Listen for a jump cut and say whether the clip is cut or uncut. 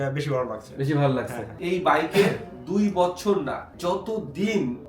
cut